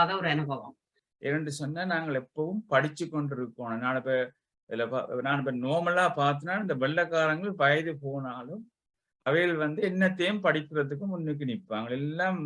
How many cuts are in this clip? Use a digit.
1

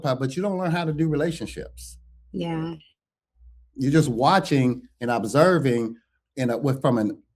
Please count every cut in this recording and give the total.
0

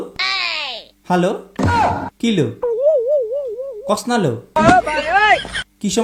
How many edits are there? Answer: 0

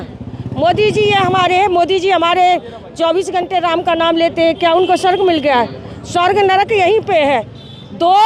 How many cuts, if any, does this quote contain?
0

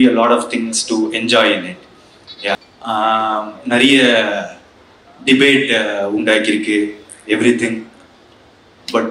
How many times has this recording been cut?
1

